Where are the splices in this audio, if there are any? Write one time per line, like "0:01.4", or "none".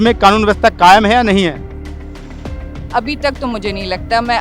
none